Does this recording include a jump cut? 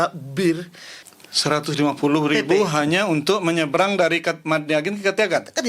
yes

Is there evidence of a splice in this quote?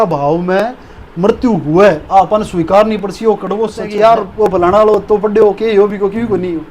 yes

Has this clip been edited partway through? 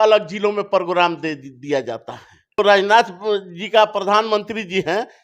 yes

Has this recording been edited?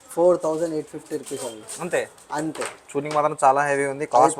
no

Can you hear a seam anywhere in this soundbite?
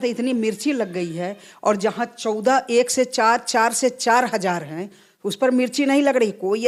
no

